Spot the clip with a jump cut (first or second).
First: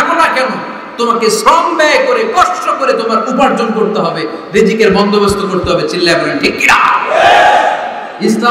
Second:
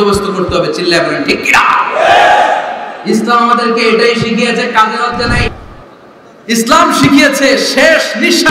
second